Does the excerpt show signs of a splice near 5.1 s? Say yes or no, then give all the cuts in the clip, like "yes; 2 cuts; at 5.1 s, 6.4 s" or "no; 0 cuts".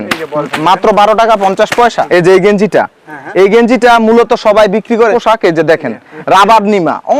yes; 2 cuts; at 2.0 s, 5.1 s